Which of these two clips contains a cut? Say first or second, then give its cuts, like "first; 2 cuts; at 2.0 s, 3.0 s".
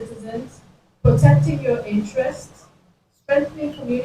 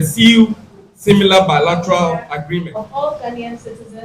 second; 1 cut; at 2.6 s